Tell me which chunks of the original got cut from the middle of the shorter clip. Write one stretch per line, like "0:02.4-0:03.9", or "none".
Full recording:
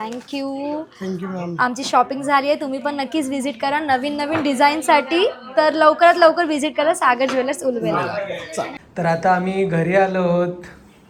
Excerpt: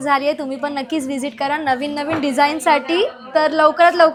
none